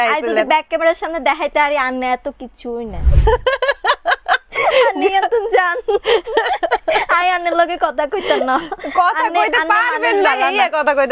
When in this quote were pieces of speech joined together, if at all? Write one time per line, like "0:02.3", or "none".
0:03.0